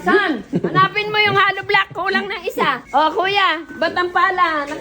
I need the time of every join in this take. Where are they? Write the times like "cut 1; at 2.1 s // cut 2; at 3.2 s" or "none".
cut 1; at 2.8 s